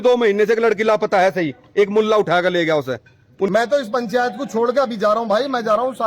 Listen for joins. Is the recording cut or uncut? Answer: cut